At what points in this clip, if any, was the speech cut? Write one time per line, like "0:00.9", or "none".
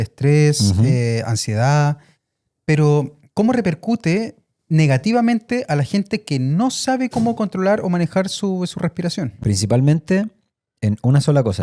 0:09.3